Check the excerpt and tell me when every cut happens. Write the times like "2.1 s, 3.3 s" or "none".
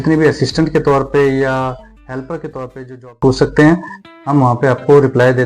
3.2 s